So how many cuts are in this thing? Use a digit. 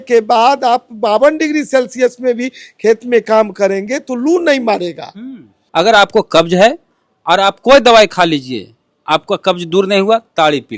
1